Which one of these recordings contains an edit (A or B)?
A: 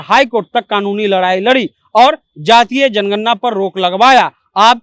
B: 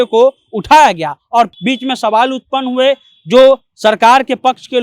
B